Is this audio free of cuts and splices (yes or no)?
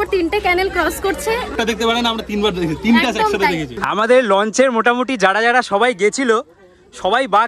no